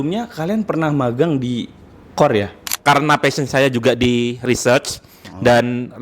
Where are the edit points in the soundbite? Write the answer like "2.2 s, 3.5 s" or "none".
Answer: 2.7 s